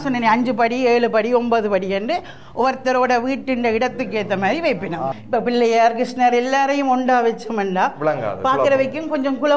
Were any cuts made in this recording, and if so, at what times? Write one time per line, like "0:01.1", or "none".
0:05.2

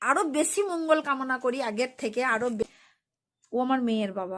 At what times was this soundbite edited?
0:02.6

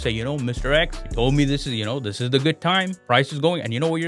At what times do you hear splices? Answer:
0:01.0
0:03.0

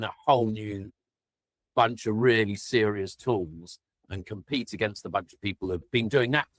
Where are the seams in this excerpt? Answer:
none

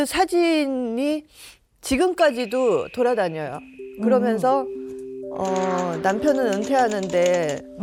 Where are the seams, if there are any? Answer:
none

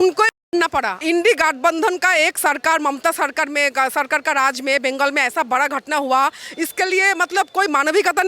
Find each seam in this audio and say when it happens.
0:01.0

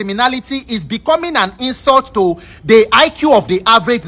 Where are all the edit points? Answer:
none

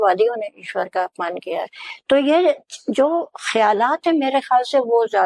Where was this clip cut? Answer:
none

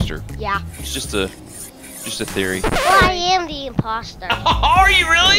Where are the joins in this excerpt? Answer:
none

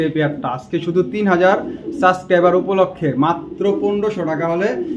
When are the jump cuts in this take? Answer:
none

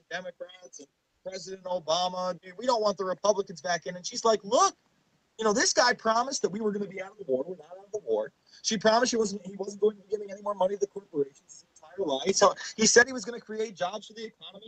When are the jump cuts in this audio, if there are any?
none

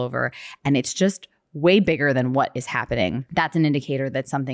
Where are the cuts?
0:03.2

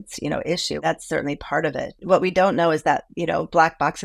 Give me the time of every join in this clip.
0:00.8
0:02.0

